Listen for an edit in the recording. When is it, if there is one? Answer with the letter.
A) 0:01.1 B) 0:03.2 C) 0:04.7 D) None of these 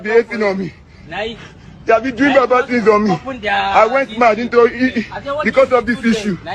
D